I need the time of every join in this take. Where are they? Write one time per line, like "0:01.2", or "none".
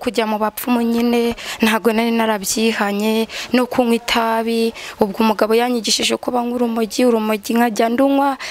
none